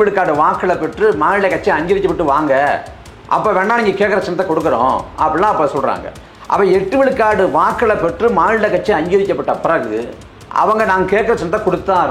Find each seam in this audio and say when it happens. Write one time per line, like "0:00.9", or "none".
none